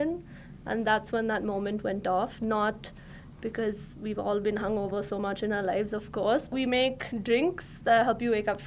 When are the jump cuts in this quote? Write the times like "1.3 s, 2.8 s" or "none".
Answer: 6.5 s

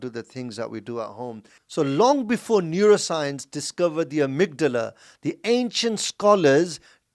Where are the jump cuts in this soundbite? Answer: 1.6 s

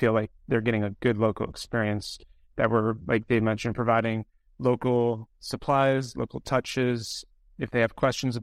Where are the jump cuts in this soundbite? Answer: 7.2 s

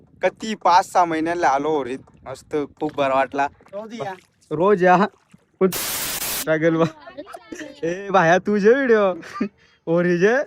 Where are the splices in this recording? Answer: 5.7 s

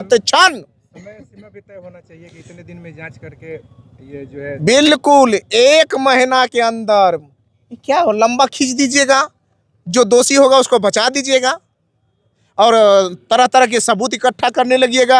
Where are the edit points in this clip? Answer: none

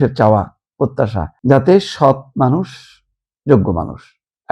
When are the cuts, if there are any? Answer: 1.3 s

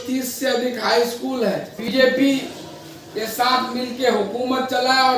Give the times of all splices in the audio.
1.9 s

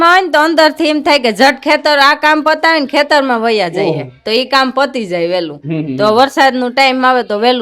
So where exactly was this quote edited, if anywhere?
none

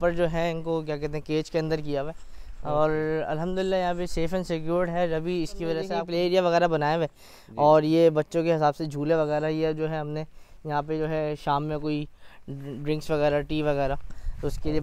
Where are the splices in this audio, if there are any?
6.0 s

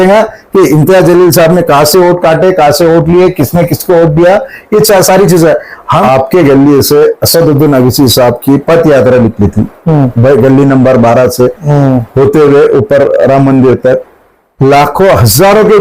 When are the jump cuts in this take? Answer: 6.0 s

